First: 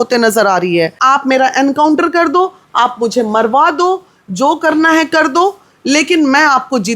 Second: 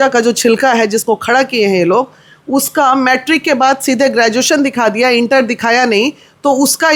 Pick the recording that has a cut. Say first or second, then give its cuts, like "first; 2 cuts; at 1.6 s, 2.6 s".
first; 1 cut; at 1.0 s